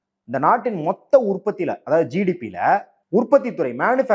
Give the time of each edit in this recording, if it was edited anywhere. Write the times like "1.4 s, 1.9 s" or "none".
2.9 s